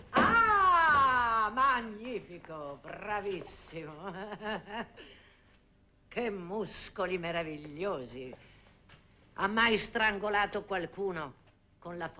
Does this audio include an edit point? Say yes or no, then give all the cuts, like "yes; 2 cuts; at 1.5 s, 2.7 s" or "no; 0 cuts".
no; 0 cuts